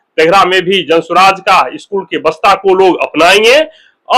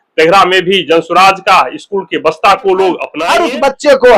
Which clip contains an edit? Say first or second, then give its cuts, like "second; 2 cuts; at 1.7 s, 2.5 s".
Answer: second; 1 cut; at 3.1 s